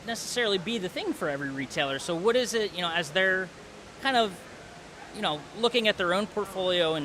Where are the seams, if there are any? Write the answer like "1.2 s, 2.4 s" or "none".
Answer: none

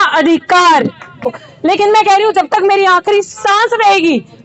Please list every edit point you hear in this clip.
1.4 s

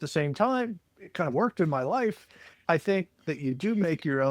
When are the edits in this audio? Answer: 2.6 s

